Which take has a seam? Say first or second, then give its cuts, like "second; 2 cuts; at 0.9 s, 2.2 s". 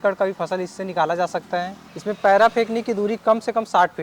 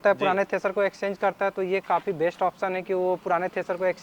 first; 1 cut; at 1.8 s